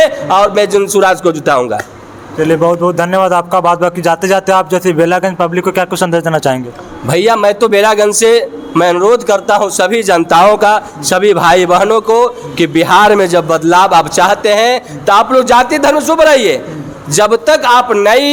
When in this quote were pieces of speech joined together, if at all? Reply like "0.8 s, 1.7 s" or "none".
none